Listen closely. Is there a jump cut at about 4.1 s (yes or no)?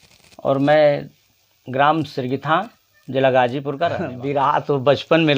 yes